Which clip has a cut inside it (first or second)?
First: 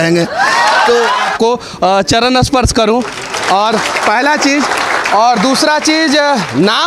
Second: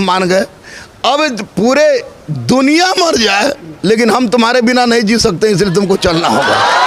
first